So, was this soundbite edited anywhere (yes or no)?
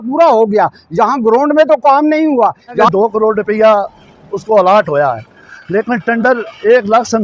yes